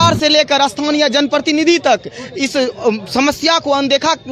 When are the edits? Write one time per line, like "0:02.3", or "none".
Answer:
none